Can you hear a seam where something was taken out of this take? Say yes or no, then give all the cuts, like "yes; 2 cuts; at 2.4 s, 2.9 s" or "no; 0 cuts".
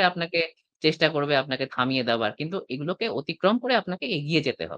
no; 0 cuts